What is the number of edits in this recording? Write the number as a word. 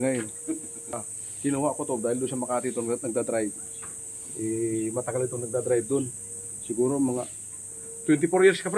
one